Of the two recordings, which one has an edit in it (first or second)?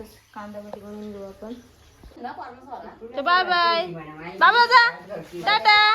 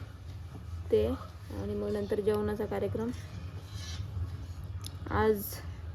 first